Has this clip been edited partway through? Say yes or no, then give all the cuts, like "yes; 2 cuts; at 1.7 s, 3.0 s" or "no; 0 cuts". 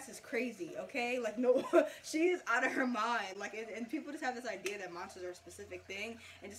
no; 0 cuts